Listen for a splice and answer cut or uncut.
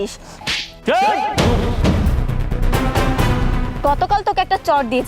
uncut